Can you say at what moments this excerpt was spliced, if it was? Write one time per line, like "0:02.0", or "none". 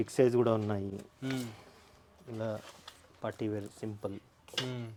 none